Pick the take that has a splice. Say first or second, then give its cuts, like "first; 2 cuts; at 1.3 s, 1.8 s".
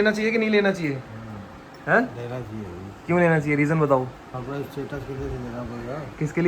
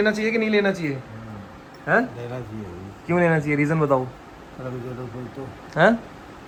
first; 1 cut; at 4.3 s